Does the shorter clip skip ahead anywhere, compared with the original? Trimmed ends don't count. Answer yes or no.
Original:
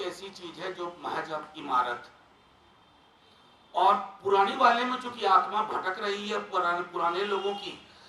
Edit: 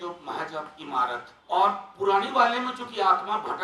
yes